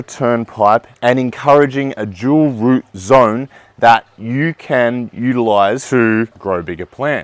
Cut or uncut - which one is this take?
cut